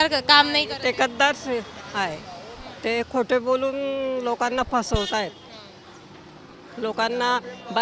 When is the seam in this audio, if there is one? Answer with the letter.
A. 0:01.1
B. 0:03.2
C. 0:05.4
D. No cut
D